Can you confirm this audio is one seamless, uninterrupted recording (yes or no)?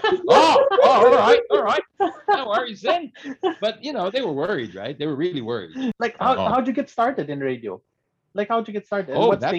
no